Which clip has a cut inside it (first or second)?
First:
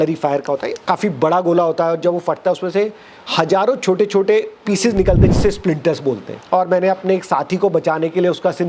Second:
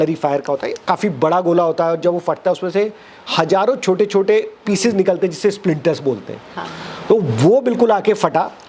first